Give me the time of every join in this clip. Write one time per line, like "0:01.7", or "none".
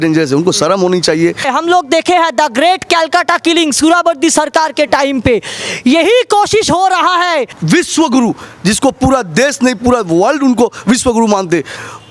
0:01.5
0:07.5